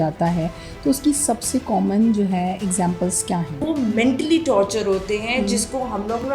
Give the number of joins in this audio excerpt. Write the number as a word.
one